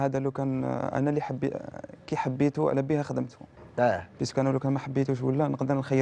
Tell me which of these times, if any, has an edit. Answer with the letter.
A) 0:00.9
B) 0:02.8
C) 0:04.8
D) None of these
D